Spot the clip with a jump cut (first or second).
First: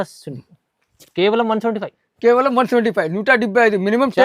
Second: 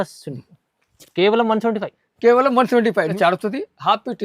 second